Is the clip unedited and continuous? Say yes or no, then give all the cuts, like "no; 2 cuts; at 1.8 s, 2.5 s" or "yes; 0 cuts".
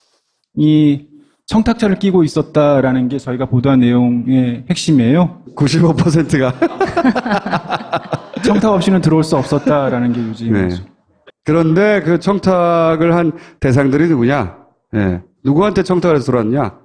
no; 1 cut; at 1.2 s